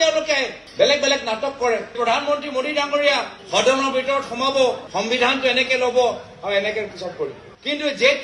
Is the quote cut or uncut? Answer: cut